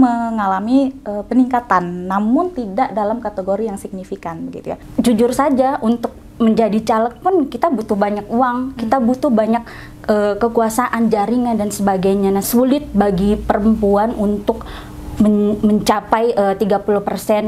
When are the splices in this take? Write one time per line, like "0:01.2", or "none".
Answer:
0:04.8
0:12.4

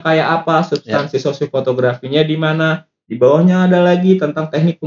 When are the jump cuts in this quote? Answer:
none

